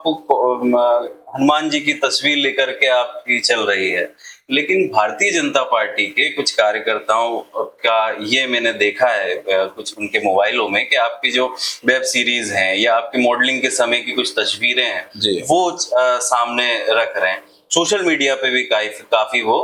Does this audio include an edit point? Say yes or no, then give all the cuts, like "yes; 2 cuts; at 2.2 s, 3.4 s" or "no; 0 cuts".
no; 0 cuts